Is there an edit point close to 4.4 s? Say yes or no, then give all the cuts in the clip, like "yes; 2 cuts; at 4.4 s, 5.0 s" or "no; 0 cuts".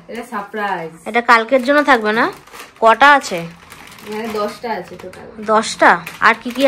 no; 0 cuts